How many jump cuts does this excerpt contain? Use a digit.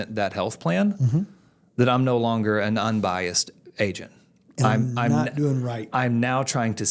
0